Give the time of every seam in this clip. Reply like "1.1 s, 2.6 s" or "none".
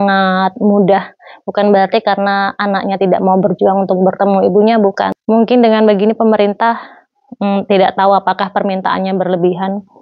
5.1 s